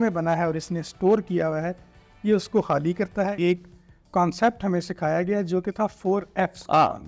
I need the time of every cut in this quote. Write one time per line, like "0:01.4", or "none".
0:03.4